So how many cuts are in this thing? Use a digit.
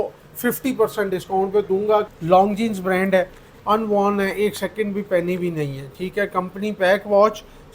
1